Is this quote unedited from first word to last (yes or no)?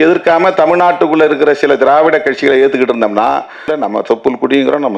no